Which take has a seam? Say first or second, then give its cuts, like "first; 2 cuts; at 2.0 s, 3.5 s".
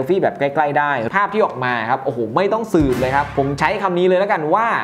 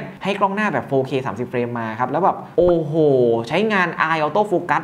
first; 1 cut; at 1.0 s